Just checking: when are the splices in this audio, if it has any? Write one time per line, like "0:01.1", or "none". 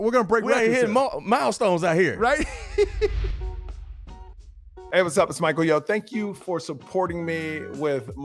0:03.3